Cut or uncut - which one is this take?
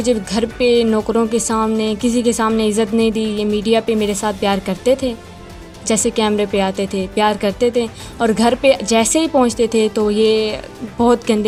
uncut